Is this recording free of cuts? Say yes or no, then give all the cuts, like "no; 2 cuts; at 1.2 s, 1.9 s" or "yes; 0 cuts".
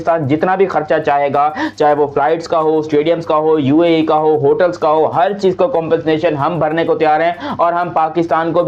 yes; 0 cuts